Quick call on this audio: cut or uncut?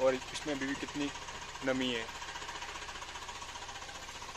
uncut